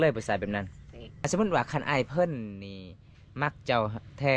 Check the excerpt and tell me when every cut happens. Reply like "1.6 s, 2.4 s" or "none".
1.3 s